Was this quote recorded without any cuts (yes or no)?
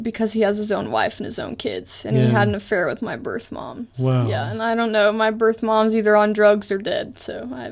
no